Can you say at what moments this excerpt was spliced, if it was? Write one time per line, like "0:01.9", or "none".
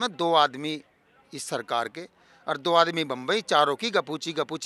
none